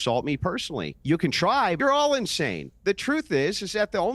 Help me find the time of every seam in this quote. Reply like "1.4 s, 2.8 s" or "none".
1.8 s

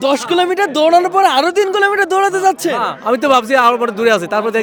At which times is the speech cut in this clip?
none

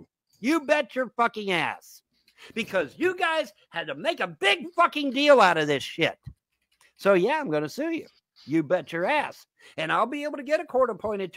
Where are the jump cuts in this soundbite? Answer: none

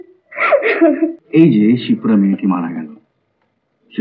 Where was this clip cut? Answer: 1.2 s

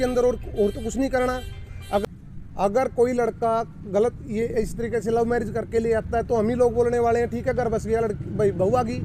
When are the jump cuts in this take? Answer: 2.0 s

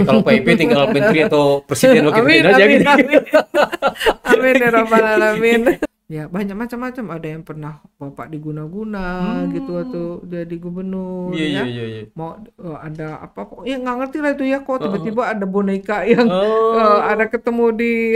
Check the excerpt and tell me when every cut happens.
5.8 s

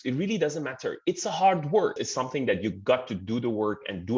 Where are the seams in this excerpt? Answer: 2.0 s

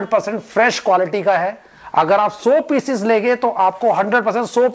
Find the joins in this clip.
none

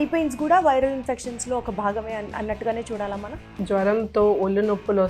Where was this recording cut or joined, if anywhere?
3.6 s

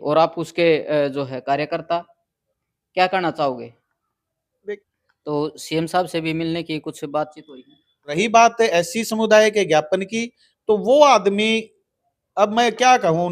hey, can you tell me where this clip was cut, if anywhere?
4.8 s, 8.1 s

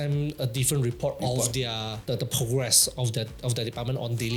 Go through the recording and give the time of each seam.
none

